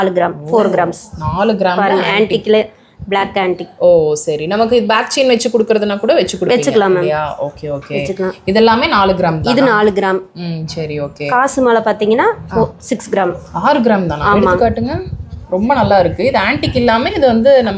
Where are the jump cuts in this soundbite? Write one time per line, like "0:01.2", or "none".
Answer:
none

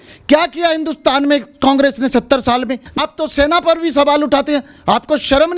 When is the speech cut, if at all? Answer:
0:03.1

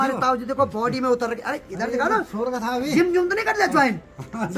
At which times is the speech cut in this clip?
none

